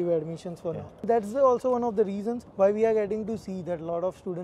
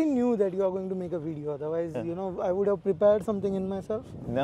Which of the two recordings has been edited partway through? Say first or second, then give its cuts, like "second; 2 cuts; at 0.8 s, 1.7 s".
first; 2 cuts; at 1.0 s, 2.4 s